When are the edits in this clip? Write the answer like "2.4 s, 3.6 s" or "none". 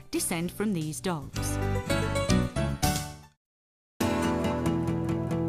none